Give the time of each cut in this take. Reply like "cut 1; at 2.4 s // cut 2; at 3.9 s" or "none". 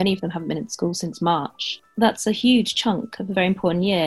cut 1; at 1.8 s // cut 2; at 3.3 s